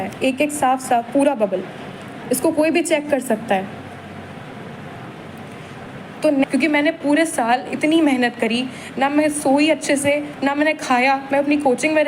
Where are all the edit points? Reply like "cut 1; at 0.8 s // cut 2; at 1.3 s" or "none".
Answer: cut 1; at 6.5 s